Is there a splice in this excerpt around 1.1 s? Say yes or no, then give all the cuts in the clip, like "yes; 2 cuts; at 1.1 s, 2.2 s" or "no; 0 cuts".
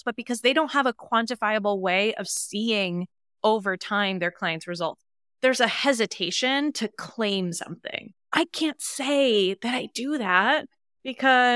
no; 1 cut; at 5.3 s